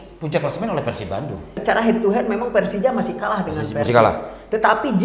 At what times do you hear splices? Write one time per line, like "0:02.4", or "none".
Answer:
0:01.6

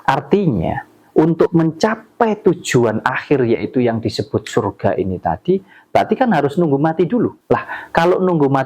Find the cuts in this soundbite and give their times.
0:07.4

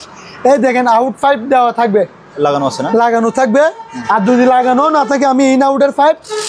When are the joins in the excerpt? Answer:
none

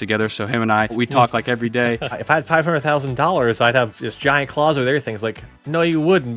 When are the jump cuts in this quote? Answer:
0:00.9
0:02.2

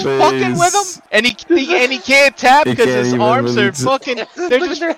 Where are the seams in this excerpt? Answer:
0:01.0

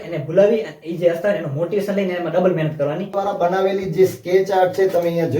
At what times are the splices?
0:03.1

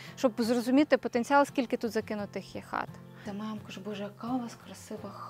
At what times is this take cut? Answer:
0:03.3

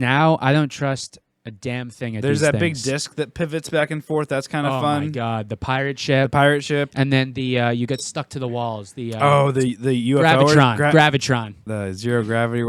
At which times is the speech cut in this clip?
0:11.6

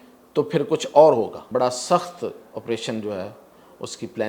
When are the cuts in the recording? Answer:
0:01.4

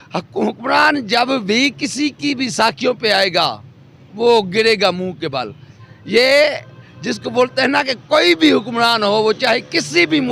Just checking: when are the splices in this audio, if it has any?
none

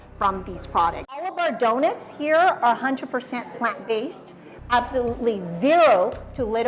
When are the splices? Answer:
0:01.4
0:04.5

